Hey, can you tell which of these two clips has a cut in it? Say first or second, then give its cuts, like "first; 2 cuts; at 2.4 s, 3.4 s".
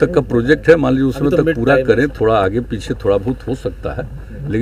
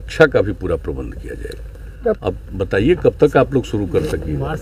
second; 1 cut; at 2.2 s